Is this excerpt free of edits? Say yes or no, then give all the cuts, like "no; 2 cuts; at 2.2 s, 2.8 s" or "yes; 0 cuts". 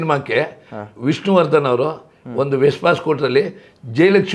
yes; 0 cuts